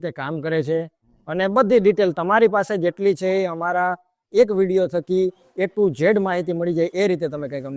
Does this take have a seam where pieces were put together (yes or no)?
no